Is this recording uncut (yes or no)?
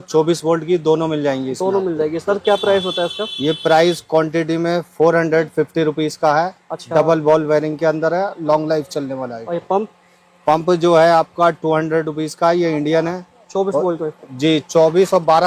yes